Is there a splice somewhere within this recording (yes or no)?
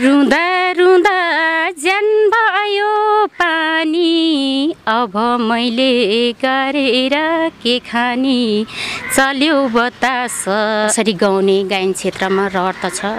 yes